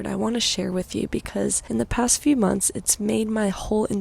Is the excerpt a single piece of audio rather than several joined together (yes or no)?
no